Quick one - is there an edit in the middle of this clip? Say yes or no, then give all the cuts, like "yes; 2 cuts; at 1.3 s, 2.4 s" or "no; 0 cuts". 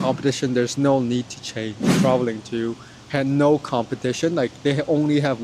yes; 1 cut; at 1.9 s